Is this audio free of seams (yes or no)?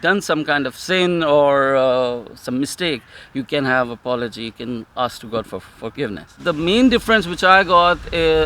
no